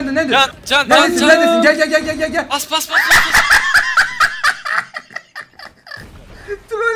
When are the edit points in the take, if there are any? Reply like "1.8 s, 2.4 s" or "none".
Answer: none